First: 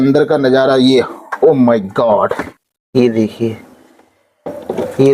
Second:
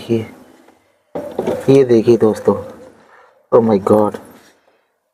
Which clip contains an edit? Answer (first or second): first